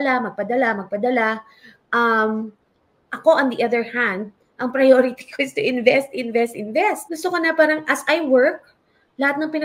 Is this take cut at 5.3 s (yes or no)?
no